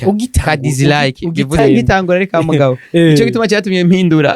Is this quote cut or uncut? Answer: cut